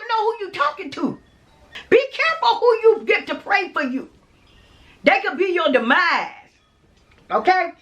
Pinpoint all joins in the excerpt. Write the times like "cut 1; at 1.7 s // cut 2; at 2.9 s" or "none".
cut 1; at 1.8 s